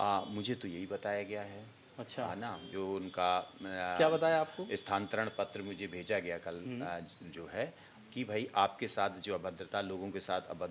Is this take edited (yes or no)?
no